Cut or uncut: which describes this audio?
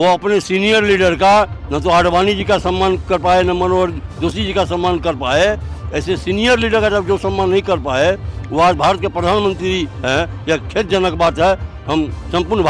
uncut